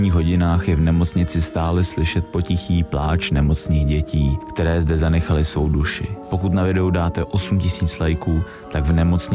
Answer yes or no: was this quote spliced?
no